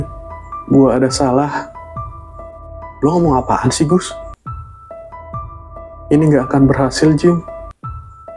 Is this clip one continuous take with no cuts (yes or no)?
yes